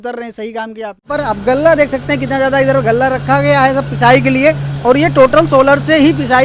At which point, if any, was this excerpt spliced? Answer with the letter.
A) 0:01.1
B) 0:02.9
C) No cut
A